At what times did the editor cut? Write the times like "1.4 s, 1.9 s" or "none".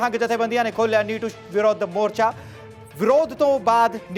none